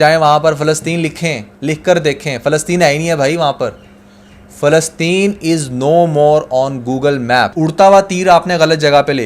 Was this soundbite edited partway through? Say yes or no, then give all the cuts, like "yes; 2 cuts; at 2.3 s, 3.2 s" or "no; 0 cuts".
yes; 1 cut; at 7.9 s